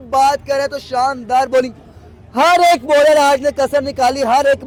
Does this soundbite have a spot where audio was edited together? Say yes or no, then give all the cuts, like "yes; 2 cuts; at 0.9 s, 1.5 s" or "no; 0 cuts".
no; 0 cuts